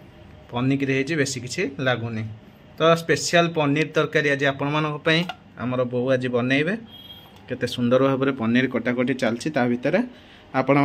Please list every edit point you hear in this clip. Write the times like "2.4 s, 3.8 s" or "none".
none

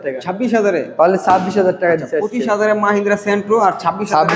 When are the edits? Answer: none

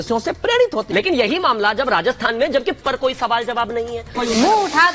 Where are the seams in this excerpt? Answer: none

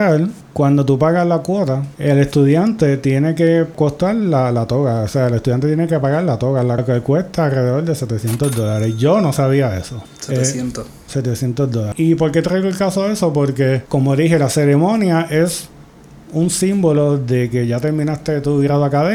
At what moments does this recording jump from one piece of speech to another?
none

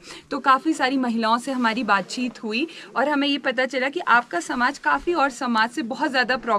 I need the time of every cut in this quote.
none

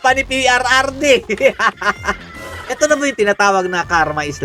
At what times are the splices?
none

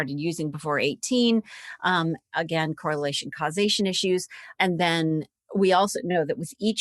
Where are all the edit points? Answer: 4.5 s

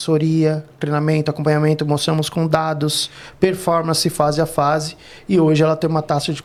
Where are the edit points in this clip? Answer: none

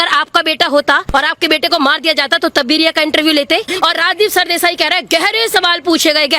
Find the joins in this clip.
3.7 s

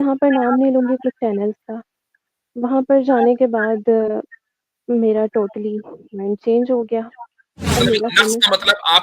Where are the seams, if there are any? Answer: 7.8 s

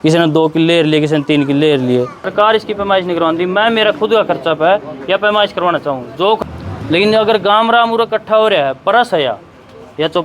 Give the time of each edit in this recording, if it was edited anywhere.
2.2 s, 6.4 s

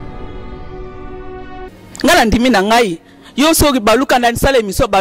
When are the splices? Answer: 1.7 s

